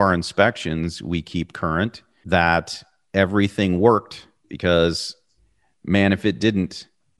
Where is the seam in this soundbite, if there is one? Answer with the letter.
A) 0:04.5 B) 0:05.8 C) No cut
A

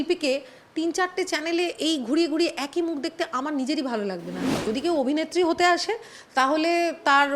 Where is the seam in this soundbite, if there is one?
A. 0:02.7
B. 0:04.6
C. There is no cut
B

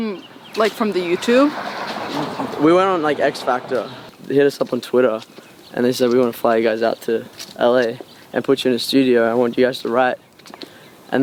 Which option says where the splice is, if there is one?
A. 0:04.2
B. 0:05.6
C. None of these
A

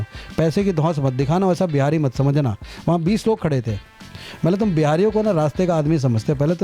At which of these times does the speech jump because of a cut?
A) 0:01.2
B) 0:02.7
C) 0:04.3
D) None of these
D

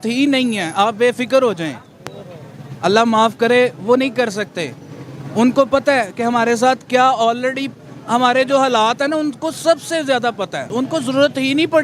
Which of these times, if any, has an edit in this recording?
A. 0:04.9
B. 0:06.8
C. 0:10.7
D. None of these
C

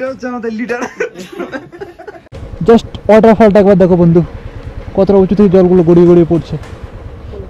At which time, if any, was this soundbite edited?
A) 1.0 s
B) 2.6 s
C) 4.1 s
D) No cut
B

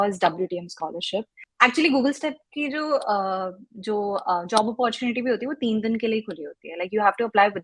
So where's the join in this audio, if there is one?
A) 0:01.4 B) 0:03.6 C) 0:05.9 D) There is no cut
A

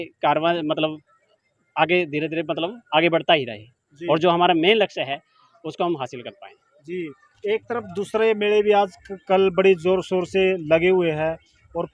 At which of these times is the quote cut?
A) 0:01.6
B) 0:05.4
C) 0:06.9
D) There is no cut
D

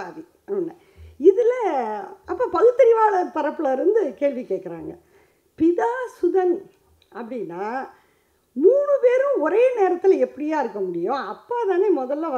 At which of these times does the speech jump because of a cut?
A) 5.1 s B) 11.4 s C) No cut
C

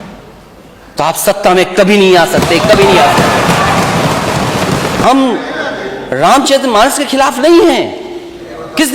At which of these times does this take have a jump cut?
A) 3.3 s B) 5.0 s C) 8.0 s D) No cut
B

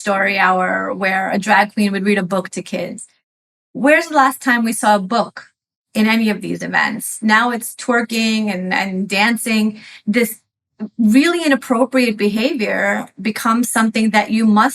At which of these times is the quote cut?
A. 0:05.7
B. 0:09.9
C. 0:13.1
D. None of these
B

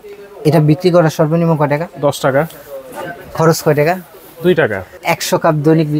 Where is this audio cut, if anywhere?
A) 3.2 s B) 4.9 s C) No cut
B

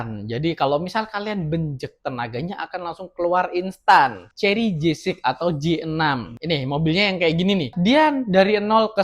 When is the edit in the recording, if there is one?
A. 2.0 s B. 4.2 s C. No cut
B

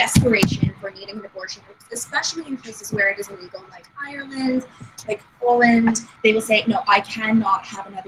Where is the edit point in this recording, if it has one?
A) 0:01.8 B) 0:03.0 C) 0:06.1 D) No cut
C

